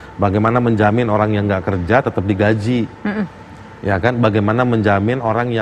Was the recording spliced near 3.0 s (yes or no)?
no